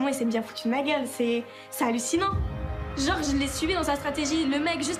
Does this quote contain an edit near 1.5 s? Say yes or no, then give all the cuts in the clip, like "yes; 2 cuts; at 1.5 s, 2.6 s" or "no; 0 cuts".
no; 0 cuts